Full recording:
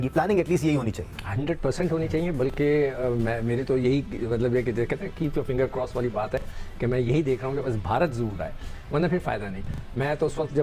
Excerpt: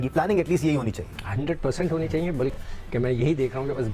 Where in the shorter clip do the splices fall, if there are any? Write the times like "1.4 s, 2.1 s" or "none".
2.5 s